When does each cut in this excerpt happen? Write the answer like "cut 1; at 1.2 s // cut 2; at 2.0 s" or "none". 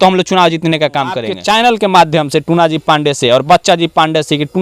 cut 1; at 1.3 s